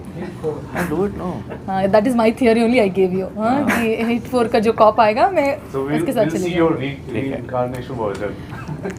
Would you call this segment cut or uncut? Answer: uncut